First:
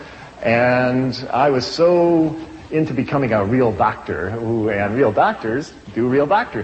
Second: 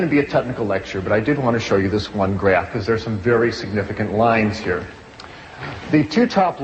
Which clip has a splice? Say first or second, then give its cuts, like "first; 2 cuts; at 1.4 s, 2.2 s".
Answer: second; 1 cut; at 3.2 s